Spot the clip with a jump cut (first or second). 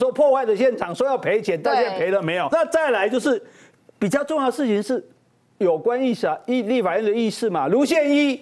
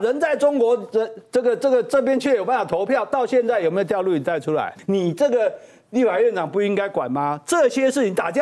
second